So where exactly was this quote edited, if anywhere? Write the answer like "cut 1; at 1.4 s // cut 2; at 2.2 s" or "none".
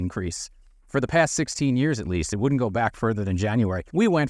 none